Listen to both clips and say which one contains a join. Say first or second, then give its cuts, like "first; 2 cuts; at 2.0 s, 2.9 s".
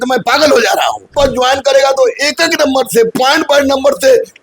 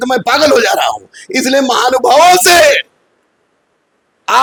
first; 1 cut; at 1.1 s